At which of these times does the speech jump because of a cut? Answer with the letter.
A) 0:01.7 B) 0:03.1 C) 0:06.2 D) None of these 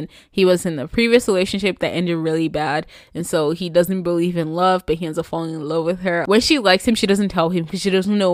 C